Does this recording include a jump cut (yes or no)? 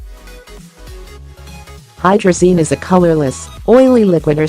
yes